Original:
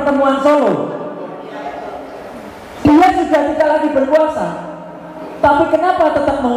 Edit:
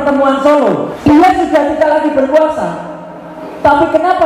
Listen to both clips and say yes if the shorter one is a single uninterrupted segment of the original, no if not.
no